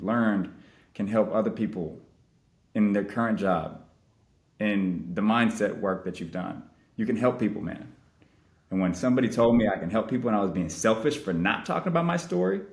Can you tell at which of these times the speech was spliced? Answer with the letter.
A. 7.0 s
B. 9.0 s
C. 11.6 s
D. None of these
D